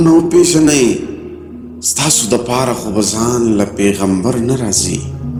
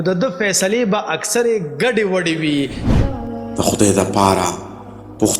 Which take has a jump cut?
second; 1 cut; at 3.0 s

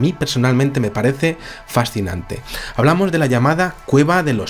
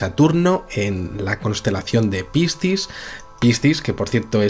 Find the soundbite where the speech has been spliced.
second; 1 cut; at 1.6 s

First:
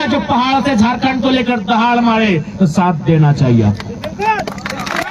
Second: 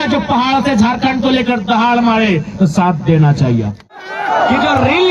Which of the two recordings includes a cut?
second; 1 cut; at 4.0 s

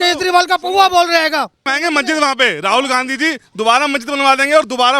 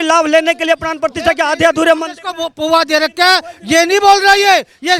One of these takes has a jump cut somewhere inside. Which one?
first; 1 cut; at 1.7 s

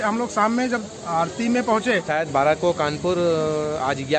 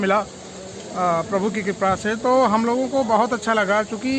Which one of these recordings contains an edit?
first; 1 cut; at 2.1 s

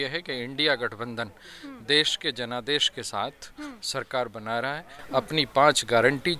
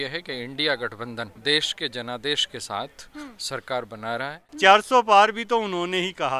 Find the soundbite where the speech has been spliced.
second; 2 cuts; at 1.3 s, 4.4 s

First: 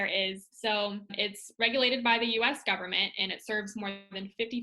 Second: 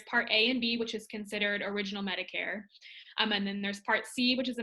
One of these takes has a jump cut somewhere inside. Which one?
first; 1 cut; at 1.1 s

